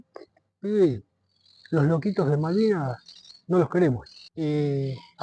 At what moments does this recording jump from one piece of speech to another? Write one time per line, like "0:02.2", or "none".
none